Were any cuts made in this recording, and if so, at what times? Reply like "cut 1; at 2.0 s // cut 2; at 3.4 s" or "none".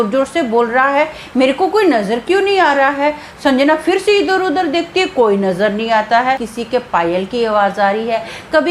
cut 1; at 6.5 s